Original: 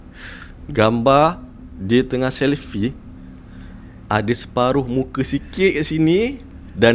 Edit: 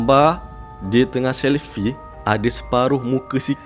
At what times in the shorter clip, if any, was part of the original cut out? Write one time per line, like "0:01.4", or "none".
0:02.1